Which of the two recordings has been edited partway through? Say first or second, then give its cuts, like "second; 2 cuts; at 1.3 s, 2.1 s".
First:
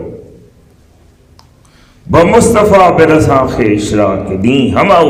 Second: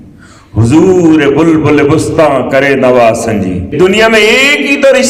second; 1 cut; at 3.7 s